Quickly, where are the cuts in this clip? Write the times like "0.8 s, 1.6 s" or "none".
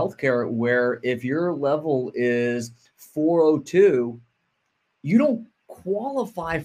none